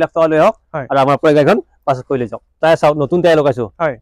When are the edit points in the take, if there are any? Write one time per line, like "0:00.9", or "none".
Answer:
0:02.5